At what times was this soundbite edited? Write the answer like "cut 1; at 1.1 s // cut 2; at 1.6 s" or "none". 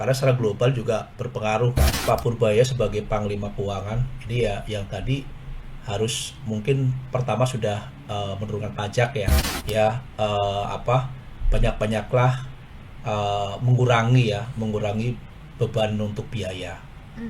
cut 1; at 1.9 s // cut 2; at 9.5 s